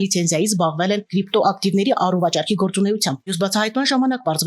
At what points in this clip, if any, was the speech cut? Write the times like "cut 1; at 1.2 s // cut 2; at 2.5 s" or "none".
cut 1; at 3.3 s